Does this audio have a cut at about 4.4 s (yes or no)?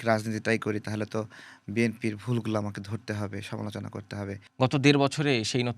yes